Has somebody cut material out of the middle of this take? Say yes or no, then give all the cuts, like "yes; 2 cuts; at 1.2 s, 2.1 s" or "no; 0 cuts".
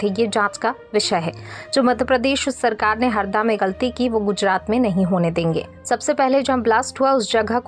no; 0 cuts